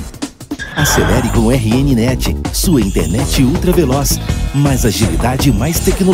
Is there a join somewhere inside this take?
no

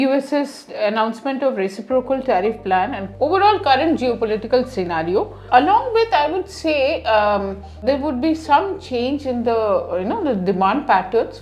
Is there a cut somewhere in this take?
yes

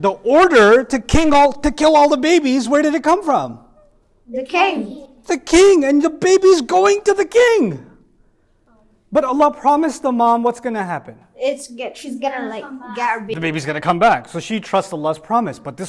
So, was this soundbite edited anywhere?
no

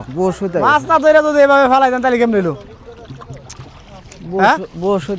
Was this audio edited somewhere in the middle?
no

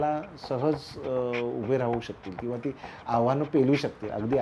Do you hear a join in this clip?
no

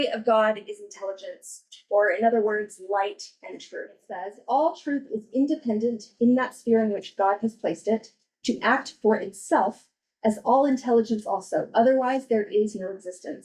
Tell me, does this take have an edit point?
yes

